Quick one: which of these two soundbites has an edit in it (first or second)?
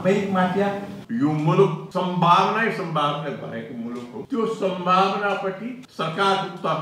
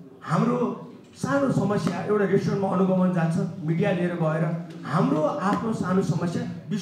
first